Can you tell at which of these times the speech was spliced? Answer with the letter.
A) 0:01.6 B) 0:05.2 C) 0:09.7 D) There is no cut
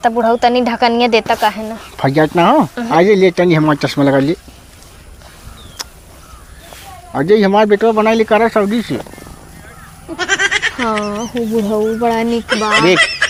D